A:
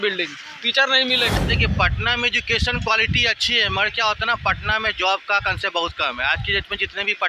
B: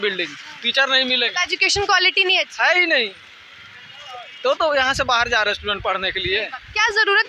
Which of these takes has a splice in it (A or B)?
A